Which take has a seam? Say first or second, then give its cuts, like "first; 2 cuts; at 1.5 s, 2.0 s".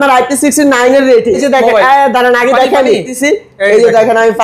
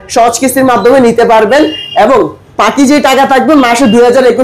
first; 2 cuts; at 1.4 s, 3.1 s